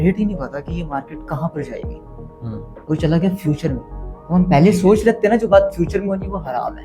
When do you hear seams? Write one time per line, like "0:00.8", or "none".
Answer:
none